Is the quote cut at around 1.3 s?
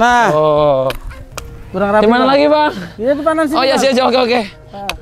no; 0 cuts

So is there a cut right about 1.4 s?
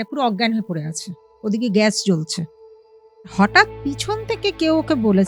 no; 1 cut; at 3.3 s

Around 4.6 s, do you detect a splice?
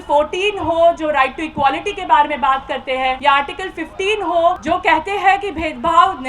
yes; 2 cuts; at 3.2 s, 4.6 s

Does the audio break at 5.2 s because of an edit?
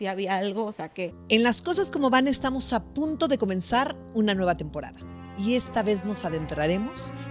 no; 1 cut; at 1.2 s

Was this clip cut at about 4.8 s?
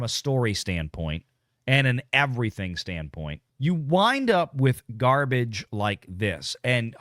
no; 1 cut; at 3.4 s

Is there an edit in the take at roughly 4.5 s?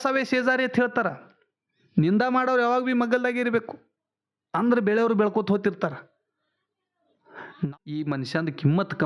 no; 1 cut; at 7.6 s

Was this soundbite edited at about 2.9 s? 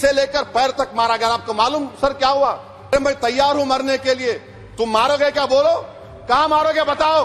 yes; 1 cut; at 2.9 s

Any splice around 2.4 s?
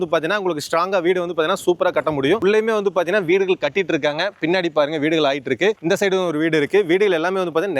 no; 0 cuts

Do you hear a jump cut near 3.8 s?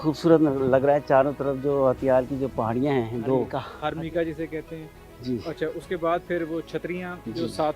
yes; 1 cut; at 3.8 s

